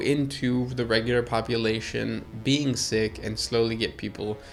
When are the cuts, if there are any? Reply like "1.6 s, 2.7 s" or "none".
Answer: none